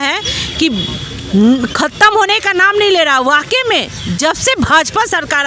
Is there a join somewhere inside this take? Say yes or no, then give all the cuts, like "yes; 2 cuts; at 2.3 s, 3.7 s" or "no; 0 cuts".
no; 0 cuts